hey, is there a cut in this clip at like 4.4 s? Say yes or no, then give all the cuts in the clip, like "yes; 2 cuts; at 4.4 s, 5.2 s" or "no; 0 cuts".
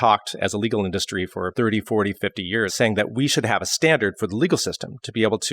no; 2 cuts; at 1.5 s, 2.7 s